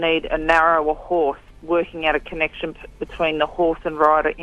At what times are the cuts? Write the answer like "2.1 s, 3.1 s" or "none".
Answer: 1.5 s